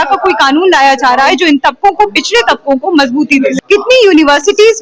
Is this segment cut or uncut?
cut